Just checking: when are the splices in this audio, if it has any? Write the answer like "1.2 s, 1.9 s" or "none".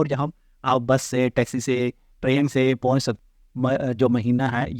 3.2 s